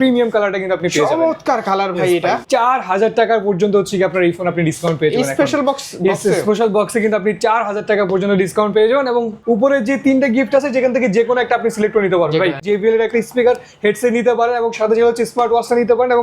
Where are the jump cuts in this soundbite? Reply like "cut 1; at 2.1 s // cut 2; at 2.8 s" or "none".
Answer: cut 1; at 2.4 s // cut 2; at 9.3 s // cut 3; at 12.6 s

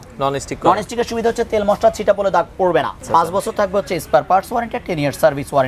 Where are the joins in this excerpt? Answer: cut 1; at 3.0 s

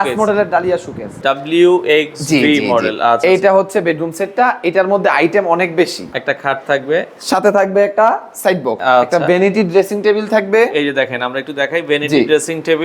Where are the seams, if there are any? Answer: cut 1; at 1.1 s // cut 2; at 6.2 s // cut 3; at 8.8 s

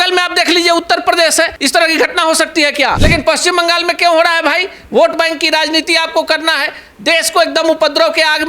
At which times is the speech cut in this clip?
cut 1; at 1.6 s // cut 2; at 3.0 s

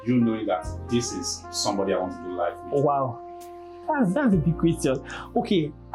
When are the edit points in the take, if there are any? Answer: none

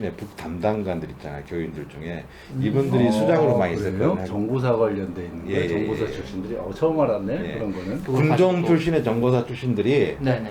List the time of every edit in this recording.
cut 1; at 8.0 s

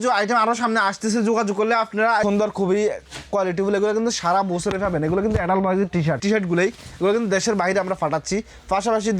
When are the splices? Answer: cut 1; at 2.2 s // cut 2; at 6.2 s

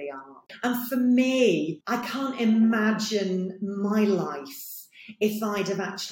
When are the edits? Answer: none

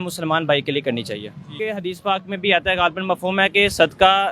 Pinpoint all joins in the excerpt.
cut 1; at 1.5 s

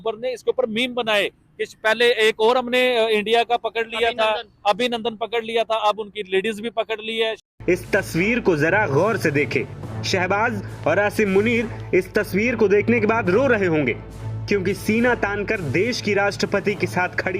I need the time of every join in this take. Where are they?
cut 1; at 7.4 s

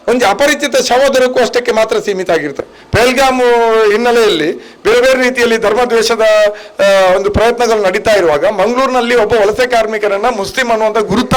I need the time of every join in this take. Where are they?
cut 1; at 2.5 s

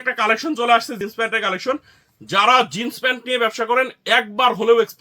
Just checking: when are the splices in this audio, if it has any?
cut 1; at 1.0 s

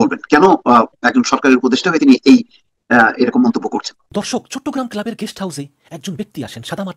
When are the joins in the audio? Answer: cut 1; at 4.0 s

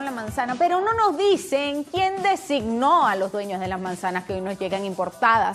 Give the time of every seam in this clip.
cut 1; at 4.5 s

